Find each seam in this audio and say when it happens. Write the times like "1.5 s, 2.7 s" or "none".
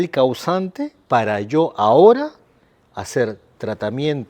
1.0 s